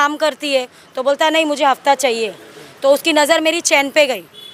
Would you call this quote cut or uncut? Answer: uncut